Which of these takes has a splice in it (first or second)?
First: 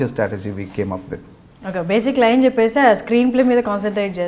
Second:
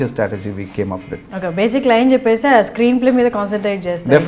second